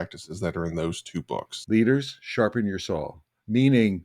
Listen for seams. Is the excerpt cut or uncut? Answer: cut